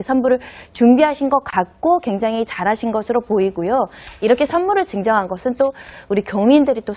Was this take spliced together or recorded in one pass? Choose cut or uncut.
cut